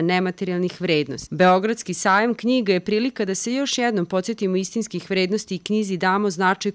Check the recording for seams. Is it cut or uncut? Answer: cut